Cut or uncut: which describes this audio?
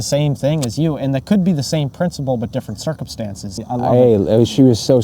cut